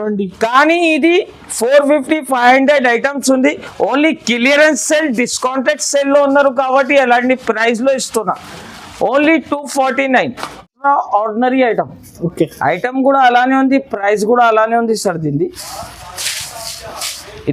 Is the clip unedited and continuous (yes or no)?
yes